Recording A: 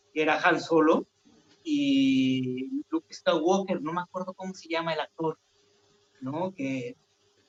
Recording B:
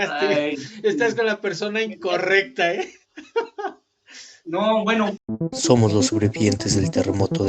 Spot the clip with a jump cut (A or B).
B